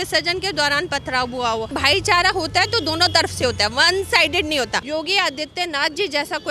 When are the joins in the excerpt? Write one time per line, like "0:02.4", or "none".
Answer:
0:01.7
0:04.8